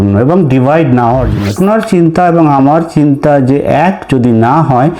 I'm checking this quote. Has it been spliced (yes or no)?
yes